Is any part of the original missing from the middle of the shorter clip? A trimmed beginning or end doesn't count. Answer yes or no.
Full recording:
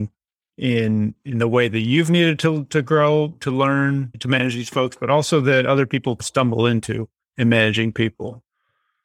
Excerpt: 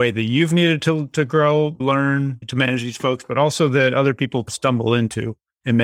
yes